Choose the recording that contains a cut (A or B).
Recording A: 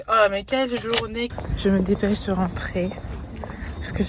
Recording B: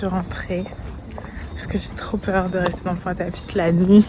A